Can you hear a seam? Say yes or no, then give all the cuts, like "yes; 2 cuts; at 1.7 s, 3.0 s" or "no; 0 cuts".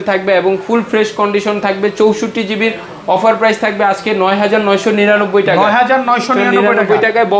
no; 0 cuts